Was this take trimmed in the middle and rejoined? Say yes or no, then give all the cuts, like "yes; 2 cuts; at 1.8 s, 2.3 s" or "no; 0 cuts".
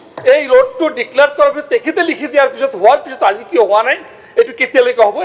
no; 0 cuts